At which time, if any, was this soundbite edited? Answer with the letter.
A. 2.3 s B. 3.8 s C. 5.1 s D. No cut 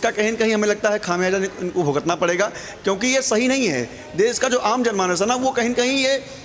D